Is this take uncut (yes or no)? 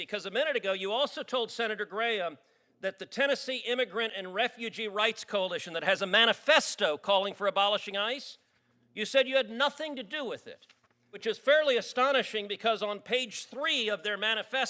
yes